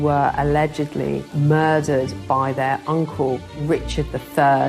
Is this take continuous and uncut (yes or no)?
no